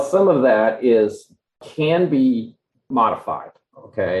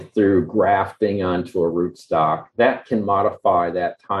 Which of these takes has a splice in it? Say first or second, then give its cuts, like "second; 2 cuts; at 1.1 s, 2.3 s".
first; 1 cut; at 1.6 s